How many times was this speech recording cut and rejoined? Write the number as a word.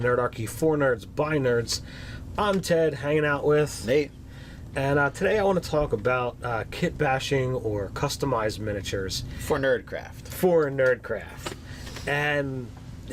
one